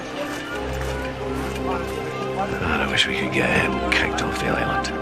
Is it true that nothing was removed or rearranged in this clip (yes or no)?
yes